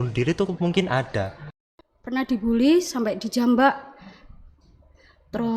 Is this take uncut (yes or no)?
no